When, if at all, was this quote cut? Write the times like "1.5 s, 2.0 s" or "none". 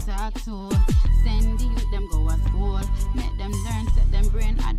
1.0 s